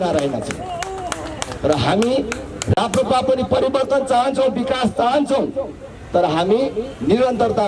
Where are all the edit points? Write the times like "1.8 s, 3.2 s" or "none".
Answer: none